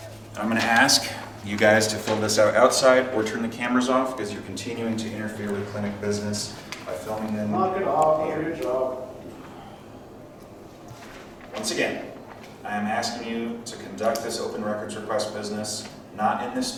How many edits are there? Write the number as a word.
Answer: zero